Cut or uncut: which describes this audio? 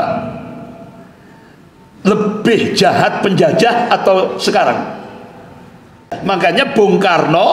cut